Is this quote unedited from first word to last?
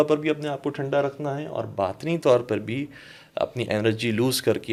yes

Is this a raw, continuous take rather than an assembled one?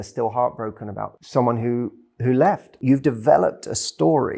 no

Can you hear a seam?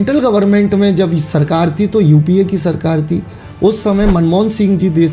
no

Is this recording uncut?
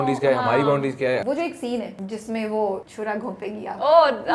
no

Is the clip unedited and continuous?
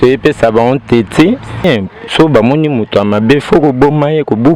no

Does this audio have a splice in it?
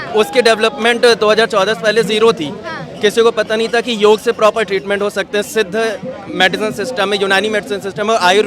no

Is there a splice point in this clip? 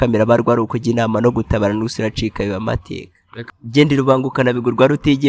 yes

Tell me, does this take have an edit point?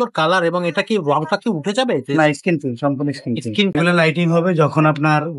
yes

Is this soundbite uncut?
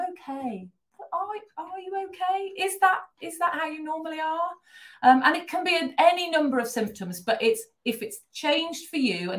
yes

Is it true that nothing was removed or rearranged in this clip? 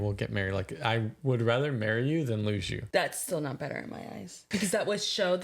no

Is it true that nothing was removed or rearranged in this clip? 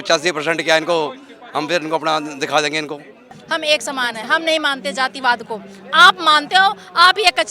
no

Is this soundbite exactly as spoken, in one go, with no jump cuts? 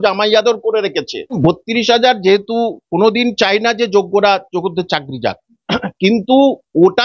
no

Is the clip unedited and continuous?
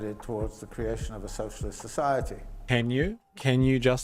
no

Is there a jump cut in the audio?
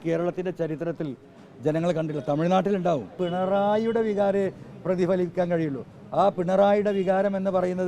yes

